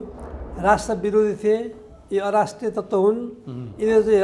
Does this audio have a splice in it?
no; 0 cuts

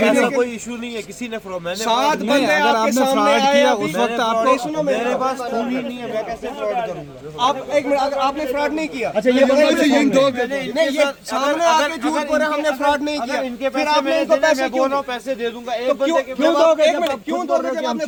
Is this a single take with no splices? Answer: yes; 0 cuts

